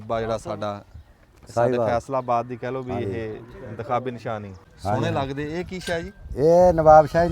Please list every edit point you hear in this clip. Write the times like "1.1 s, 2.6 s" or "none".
4.6 s